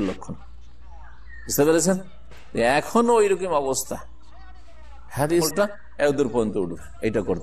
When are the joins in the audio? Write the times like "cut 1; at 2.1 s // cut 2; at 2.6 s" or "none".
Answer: cut 1; at 5.5 s